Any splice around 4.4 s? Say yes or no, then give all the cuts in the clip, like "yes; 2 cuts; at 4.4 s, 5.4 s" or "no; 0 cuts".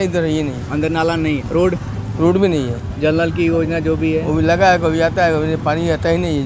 no; 1 cut; at 1.5 s